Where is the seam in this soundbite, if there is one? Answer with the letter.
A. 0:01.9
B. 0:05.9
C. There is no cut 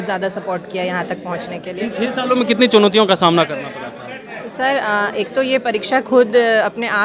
C